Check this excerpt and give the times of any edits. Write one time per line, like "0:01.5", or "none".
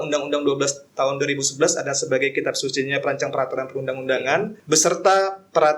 0:04.6